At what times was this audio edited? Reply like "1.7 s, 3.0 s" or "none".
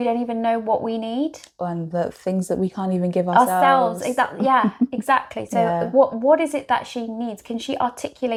none